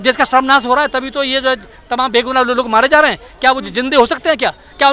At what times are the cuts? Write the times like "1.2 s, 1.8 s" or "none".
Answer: none